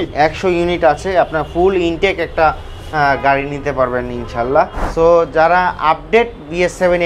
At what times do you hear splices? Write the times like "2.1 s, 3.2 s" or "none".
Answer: 4.8 s